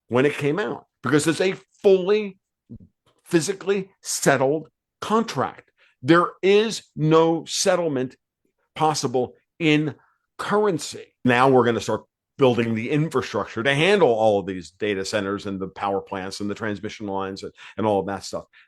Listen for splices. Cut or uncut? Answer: cut